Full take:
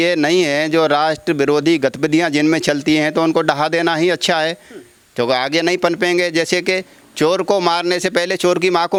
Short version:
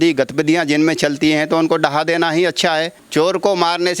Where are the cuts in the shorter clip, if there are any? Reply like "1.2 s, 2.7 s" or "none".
3.0 s